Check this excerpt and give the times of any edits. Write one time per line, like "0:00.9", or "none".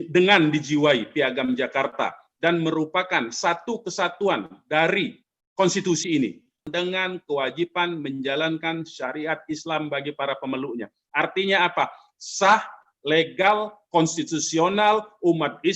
0:06.6